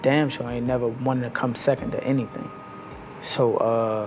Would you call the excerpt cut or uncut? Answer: uncut